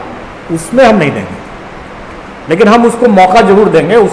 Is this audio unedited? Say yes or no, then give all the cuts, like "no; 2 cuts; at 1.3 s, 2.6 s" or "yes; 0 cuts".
yes; 0 cuts